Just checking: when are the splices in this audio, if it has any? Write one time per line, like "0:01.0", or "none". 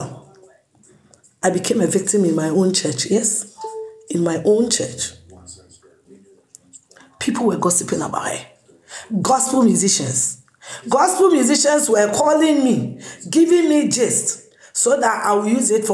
0:05.9